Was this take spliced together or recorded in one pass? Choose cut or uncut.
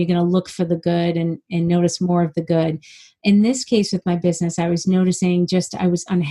uncut